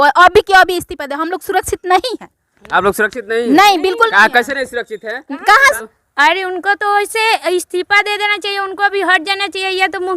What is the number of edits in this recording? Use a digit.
1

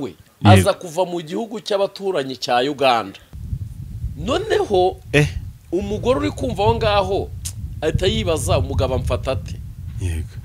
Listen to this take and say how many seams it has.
1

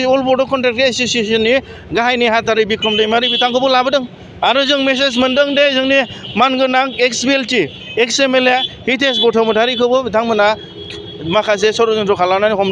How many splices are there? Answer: 0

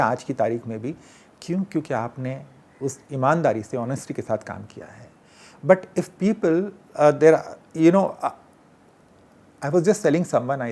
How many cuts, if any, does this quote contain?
0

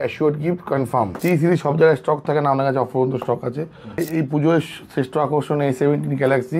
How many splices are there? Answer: 2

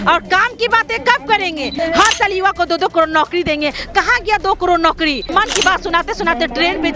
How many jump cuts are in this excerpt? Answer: 2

